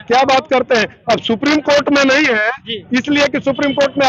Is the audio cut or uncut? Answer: uncut